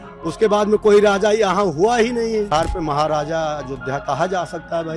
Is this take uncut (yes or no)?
no